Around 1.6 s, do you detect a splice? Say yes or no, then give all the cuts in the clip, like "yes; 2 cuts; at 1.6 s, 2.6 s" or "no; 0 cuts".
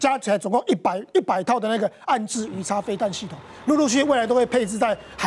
no; 0 cuts